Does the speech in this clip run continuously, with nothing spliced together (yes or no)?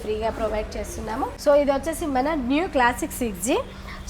no